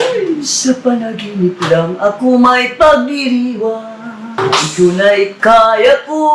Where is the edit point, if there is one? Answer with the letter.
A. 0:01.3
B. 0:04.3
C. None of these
B